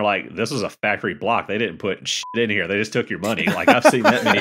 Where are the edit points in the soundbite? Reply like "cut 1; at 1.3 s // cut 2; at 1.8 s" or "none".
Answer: none

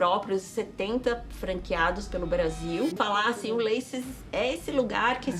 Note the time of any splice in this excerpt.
cut 1; at 2.9 s

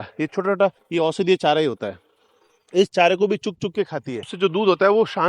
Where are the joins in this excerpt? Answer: cut 1; at 0.8 s // cut 2; at 4.3 s

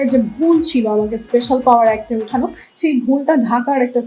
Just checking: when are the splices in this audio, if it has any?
none

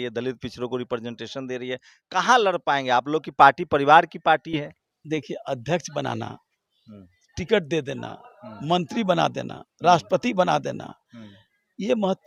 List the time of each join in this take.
none

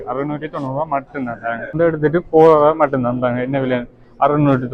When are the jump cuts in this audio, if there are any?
cut 1; at 1.8 s

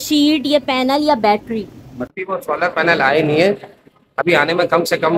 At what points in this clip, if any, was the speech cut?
cut 1; at 2.0 s

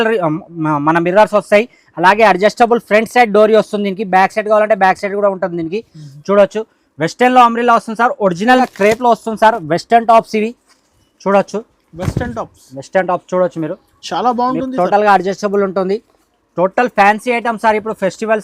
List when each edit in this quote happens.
cut 1; at 8.6 s

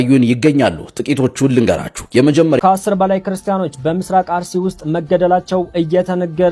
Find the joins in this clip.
cut 1; at 2.6 s

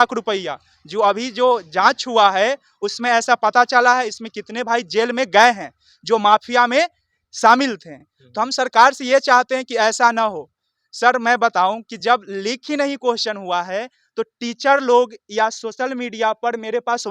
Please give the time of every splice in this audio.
none

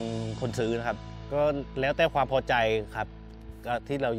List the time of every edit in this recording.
cut 1; at 1.1 s

